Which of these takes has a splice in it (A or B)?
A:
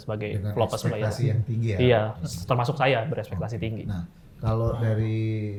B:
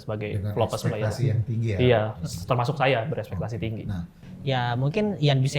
B